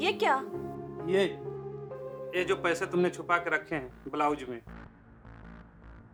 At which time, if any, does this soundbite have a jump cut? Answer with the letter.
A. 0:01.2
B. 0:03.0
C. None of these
C